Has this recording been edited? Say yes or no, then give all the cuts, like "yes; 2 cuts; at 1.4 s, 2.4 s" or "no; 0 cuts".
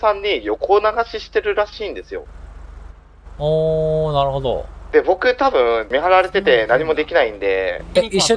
no; 0 cuts